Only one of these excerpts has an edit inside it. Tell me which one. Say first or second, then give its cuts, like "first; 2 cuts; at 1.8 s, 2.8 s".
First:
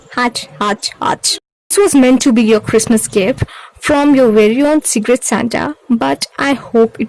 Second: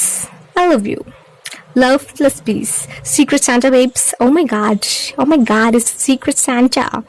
first; 1 cut; at 1.7 s